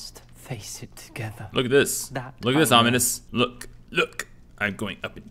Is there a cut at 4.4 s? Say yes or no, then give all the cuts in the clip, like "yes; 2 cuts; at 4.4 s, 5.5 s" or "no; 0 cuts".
no; 1 cut; at 3.2 s